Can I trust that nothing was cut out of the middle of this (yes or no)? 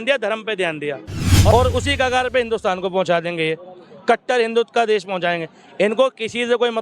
no